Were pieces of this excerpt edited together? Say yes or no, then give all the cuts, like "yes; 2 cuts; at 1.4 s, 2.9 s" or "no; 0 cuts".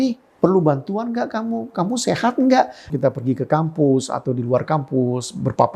yes; 1 cut; at 2.8 s